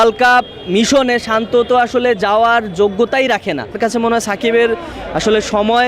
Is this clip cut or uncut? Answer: cut